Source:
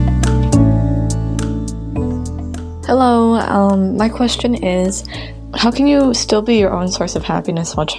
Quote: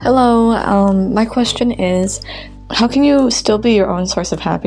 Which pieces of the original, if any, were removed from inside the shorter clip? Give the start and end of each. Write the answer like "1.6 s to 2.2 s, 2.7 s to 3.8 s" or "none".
none